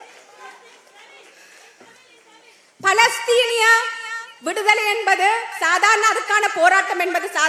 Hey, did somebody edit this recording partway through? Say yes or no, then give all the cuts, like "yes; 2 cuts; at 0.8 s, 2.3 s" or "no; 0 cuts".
no; 0 cuts